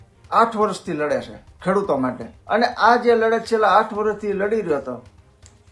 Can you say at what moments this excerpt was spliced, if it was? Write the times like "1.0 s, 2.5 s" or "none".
2.3 s